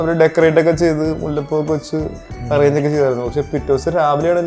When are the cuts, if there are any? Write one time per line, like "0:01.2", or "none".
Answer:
none